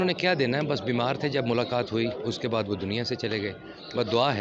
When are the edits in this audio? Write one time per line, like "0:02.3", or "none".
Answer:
none